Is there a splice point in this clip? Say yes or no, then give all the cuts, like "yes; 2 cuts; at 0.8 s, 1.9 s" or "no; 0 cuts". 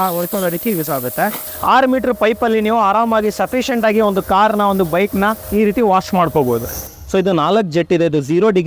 yes; 3 cuts; at 1.5 s, 5.4 s, 6.9 s